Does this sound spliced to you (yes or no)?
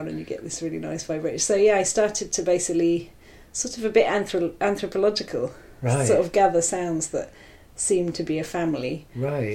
no